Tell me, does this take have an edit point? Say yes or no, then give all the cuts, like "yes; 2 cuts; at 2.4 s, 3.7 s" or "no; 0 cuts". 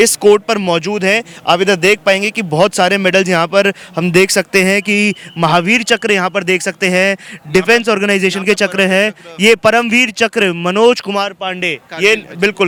no; 0 cuts